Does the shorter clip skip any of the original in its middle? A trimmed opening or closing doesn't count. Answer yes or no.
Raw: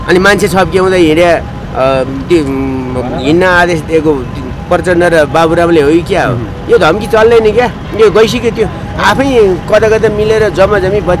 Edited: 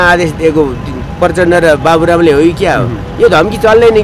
no